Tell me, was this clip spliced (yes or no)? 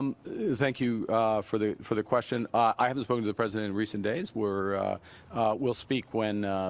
no